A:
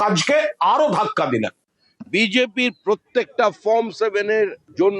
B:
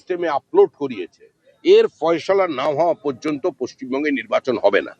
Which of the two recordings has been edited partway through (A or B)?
A